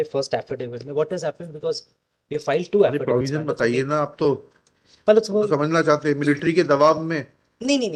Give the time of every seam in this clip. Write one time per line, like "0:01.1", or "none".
none